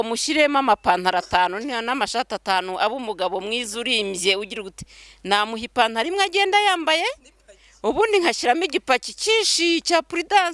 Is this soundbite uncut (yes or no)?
yes